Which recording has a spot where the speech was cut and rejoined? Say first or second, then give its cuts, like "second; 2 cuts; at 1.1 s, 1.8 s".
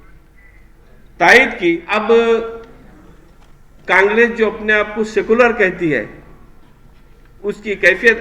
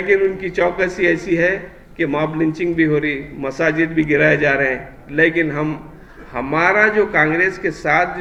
first; 1 cut; at 1.9 s